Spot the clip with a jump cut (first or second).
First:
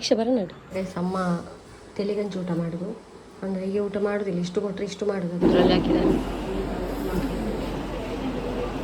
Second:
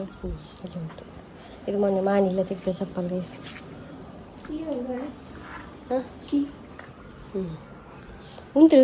first